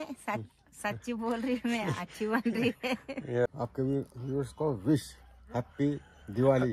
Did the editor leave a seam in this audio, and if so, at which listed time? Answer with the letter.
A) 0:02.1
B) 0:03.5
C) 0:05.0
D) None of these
B